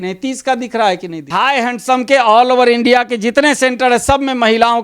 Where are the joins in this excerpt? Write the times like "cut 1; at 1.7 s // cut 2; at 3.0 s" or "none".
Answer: cut 1; at 1.3 s